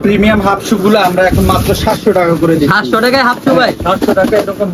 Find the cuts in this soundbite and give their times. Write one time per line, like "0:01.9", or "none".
none